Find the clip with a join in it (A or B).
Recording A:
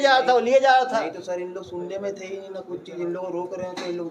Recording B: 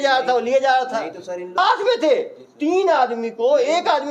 B